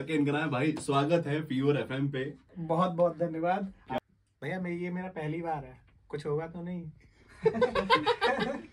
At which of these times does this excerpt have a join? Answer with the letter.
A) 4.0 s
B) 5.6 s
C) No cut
A